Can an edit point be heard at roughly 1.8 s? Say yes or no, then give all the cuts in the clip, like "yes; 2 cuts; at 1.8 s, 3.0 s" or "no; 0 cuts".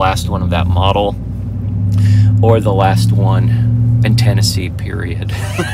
no; 0 cuts